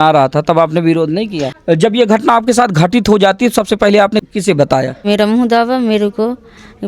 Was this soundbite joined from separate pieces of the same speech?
yes; 2 cuts; at 1.5 s, 5.0 s

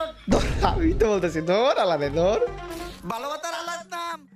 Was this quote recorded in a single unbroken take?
no; 1 cut; at 2.9 s

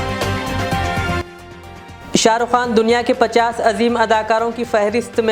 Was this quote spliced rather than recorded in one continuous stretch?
yes; 1 cut; at 1.2 s

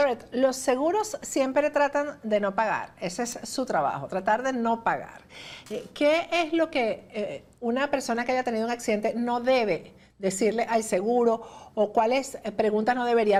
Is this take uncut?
yes; 0 cuts

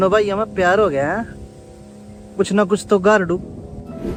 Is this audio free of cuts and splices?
yes; 0 cuts

